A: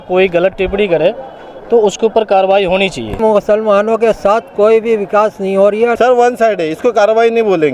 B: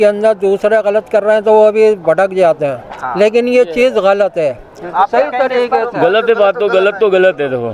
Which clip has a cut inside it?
A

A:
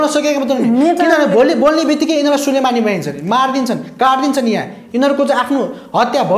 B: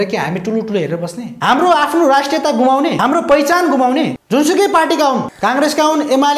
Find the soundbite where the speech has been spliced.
B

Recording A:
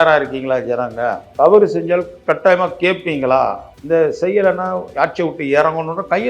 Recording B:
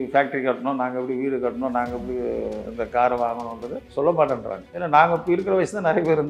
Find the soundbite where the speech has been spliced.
A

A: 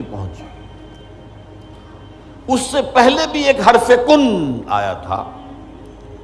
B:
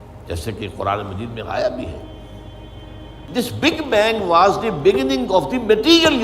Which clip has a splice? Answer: B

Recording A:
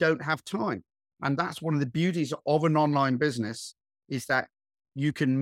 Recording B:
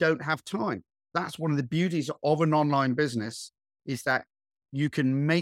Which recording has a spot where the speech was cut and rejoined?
B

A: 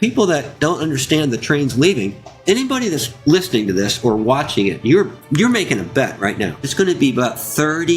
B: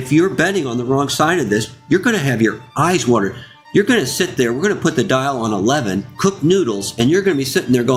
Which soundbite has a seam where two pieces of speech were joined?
A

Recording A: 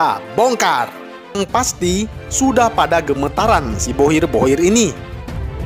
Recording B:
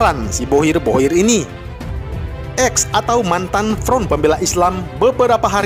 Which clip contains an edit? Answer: A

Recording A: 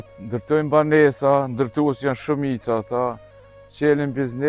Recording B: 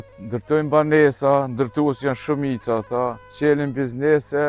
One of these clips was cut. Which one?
B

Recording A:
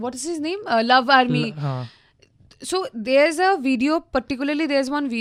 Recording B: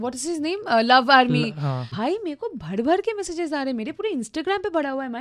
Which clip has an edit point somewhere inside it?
B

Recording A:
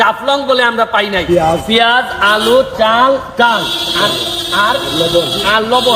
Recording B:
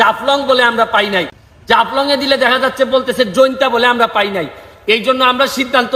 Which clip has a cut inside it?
A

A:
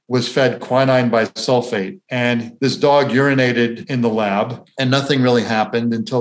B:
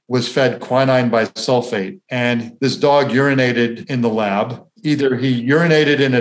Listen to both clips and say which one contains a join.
A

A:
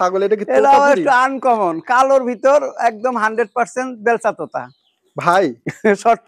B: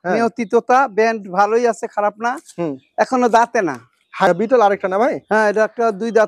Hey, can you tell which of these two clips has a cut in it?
B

